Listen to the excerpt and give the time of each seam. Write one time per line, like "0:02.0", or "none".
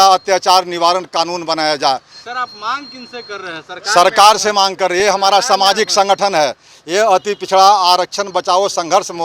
none